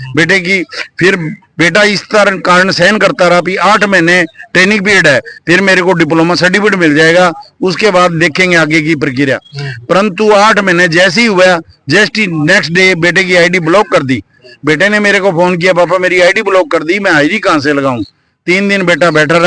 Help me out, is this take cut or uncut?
uncut